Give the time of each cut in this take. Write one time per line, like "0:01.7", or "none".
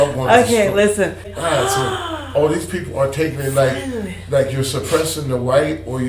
0:01.3